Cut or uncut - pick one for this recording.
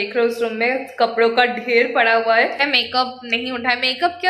cut